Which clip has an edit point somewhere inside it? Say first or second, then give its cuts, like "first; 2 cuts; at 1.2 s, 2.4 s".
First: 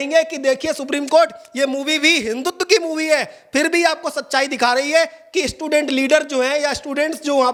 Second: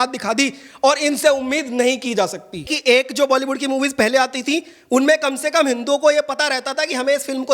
second; 1 cut; at 2.7 s